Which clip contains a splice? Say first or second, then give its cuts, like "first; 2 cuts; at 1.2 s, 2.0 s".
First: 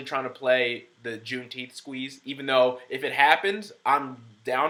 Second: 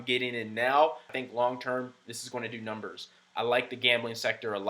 second; 1 cut; at 1.1 s